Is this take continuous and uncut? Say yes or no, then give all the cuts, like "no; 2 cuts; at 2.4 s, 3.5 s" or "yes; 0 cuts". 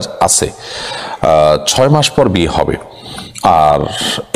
yes; 0 cuts